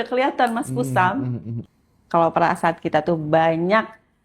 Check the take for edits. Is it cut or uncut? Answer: cut